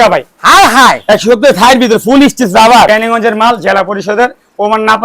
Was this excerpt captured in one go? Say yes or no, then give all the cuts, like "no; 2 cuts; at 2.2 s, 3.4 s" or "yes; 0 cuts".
no; 1 cut; at 2.9 s